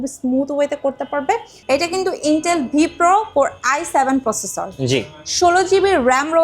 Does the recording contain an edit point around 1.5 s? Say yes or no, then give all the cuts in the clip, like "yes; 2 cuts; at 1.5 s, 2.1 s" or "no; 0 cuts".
yes; 1 cut; at 1.5 s